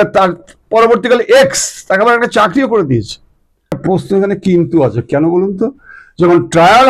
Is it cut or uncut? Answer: cut